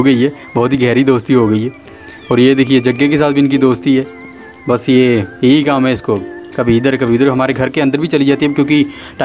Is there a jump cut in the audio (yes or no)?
no